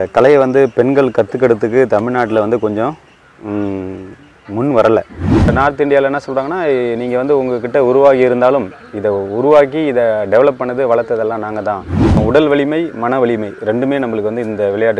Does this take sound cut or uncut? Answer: cut